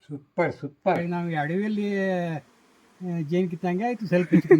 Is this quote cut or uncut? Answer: cut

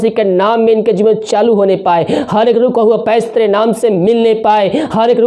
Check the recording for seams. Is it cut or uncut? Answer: uncut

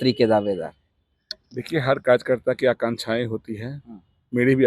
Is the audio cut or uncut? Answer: uncut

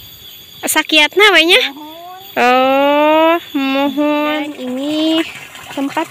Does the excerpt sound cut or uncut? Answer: cut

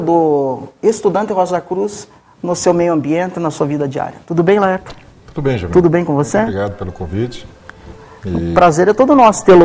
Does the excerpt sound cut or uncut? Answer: cut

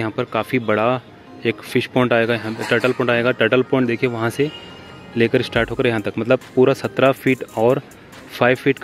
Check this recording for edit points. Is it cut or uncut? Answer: uncut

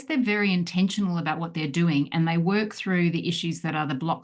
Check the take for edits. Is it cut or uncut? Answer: uncut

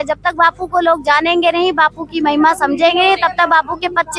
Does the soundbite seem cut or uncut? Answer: uncut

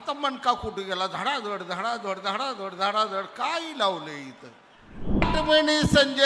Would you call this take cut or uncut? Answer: cut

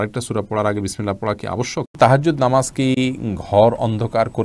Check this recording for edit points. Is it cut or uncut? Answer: cut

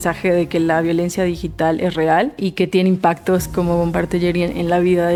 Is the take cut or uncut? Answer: uncut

